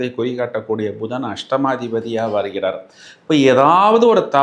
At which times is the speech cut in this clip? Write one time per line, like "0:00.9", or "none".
none